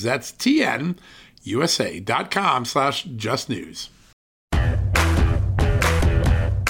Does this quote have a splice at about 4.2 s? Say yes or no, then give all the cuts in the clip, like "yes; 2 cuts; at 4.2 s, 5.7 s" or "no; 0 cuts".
yes; 1 cut; at 4.2 s